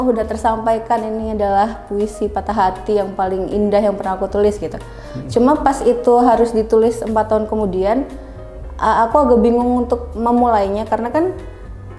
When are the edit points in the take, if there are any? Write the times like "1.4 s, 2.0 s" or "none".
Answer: none

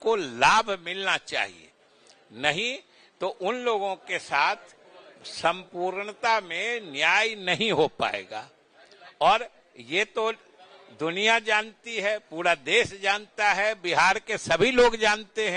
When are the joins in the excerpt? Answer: none

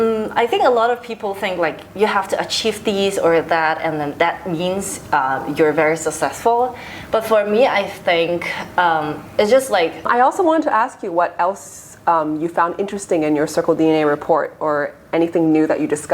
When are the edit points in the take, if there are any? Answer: 10.0 s

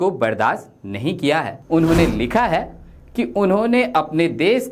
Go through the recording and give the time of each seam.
1.6 s

